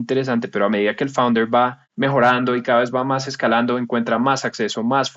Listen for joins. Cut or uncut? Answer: cut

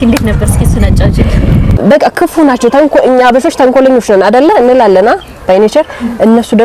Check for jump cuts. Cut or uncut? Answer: cut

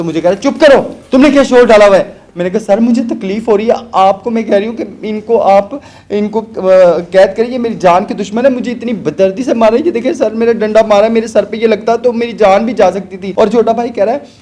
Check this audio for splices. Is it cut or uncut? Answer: cut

